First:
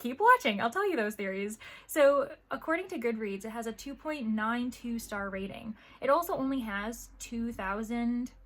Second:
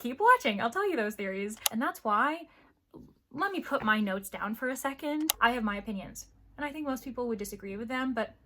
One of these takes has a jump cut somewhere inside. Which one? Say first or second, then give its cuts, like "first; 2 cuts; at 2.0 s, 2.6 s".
second; 2 cuts; at 1.6 s, 5.3 s